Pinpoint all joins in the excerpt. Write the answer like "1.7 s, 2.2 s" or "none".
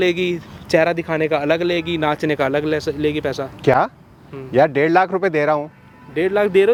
none